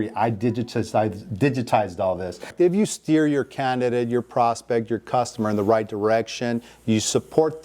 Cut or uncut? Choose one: cut